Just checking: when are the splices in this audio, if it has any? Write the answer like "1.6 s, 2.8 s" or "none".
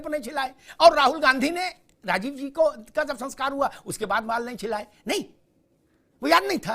none